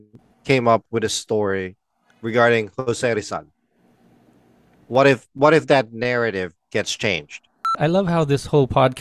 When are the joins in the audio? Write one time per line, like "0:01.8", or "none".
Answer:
0:07.7